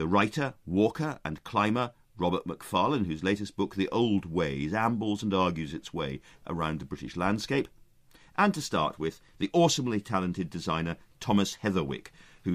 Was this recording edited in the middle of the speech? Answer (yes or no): yes